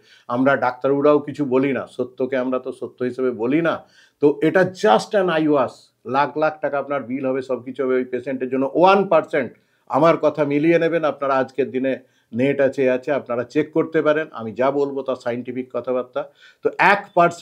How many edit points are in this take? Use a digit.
0